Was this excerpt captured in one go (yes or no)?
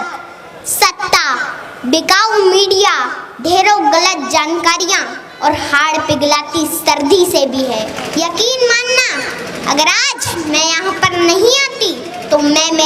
no